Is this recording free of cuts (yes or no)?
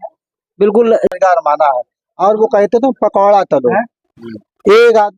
no